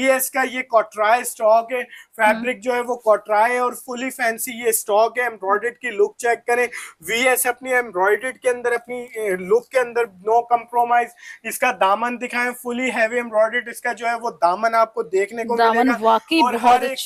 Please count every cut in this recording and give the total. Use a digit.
0